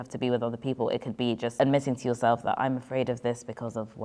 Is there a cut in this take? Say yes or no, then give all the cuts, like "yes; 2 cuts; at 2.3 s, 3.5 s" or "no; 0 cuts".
yes; 1 cut; at 1.5 s